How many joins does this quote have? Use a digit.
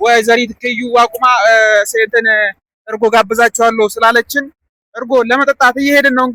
0